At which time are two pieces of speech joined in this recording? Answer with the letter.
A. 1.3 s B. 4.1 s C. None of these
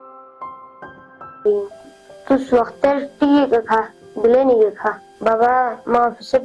A